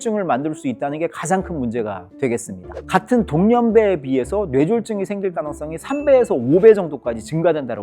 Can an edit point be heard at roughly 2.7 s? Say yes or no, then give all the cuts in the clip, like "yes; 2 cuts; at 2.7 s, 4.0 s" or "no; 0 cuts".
yes; 1 cut; at 2.7 s